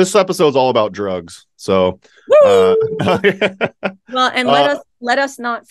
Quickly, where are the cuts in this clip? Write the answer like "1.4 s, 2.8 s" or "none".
none